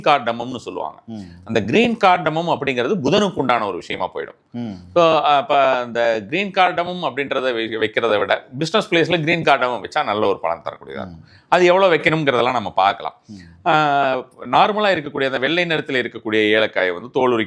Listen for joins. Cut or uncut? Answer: uncut